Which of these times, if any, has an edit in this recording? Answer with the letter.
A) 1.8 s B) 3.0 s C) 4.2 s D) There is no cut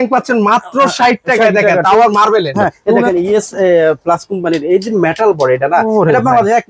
B